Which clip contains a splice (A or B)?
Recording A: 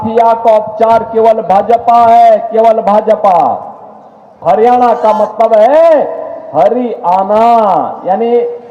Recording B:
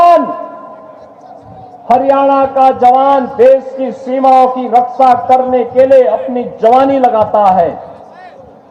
A